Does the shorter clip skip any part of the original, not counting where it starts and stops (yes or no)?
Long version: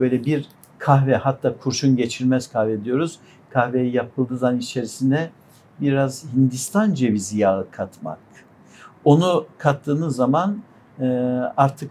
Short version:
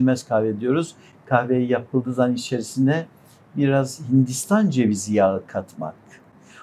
no